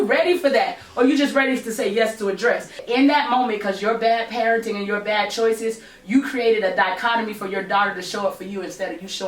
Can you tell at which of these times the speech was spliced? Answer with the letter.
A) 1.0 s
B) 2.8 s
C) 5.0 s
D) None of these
B